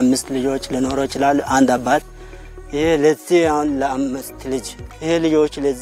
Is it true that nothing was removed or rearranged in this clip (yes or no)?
no